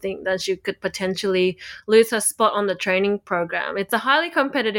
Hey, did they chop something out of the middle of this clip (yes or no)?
no